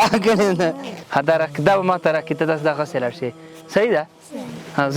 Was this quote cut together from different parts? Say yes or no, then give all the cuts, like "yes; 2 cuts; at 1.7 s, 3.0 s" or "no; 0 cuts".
yes; 1 cut; at 0.9 s